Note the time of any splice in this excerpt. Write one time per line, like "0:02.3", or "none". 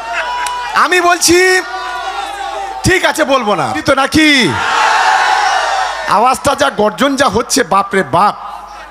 0:03.8